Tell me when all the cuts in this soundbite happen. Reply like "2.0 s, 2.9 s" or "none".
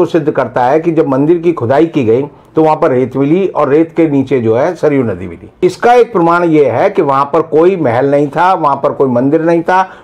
5.6 s